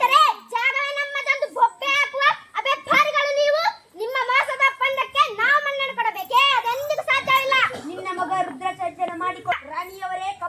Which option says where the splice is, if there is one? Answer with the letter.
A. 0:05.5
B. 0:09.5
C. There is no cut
B